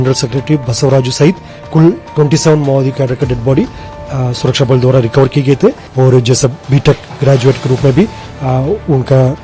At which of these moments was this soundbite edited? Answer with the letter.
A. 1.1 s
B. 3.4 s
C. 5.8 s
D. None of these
C